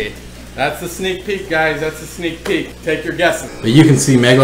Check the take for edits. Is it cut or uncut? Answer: cut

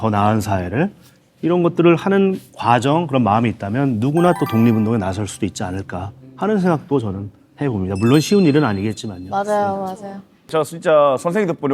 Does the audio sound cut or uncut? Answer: cut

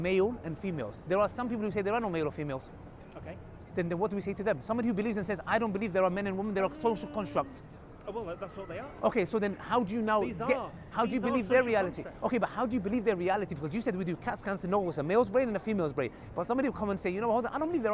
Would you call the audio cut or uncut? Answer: uncut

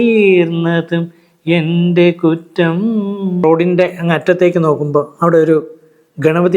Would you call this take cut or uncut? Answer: cut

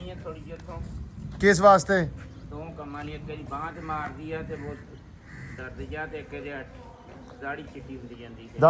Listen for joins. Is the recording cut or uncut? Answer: uncut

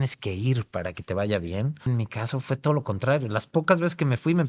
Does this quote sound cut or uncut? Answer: cut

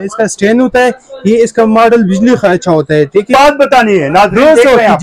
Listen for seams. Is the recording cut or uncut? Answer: cut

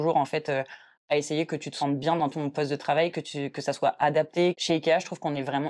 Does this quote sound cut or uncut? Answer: cut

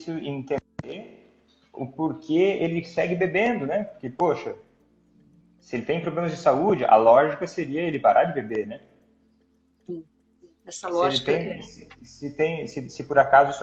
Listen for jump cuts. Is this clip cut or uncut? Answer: uncut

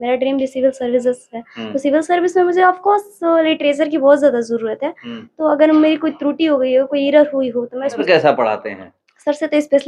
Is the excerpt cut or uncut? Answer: cut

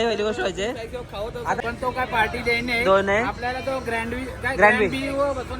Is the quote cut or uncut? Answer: cut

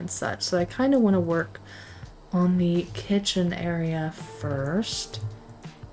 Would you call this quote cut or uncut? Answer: uncut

